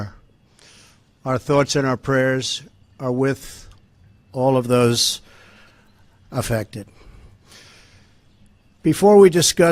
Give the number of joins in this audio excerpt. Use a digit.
1